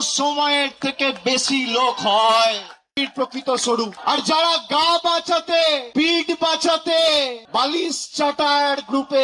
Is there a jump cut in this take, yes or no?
yes